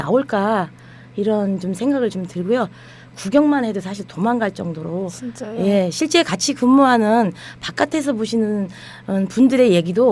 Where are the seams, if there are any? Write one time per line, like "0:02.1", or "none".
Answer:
0:05.1